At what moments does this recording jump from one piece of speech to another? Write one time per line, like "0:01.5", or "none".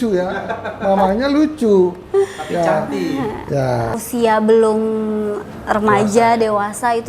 0:04.0